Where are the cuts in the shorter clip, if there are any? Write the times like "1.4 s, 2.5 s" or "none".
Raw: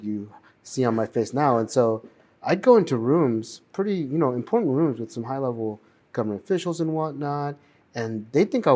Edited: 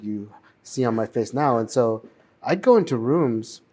none